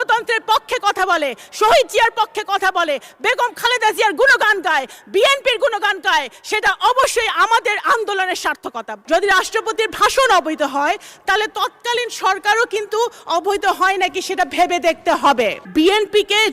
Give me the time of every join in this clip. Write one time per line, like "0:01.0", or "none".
0:08.9
0:15.6